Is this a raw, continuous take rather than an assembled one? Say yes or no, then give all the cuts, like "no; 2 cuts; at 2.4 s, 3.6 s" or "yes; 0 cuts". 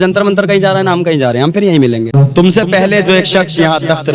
no; 1 cut; at 2.2 s